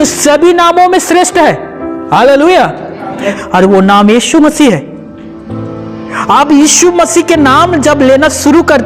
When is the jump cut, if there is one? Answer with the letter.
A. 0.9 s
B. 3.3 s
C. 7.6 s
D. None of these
B